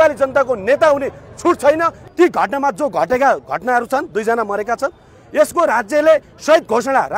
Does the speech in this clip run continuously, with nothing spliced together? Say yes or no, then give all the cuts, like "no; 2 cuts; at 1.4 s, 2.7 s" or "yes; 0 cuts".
no; 1 cut; at 2.0 s